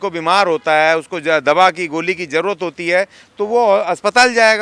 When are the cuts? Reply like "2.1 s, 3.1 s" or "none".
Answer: none